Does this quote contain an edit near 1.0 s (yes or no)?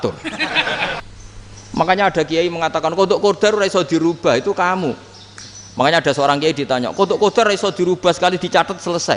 yes